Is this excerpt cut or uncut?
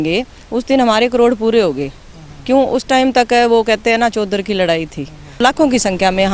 cut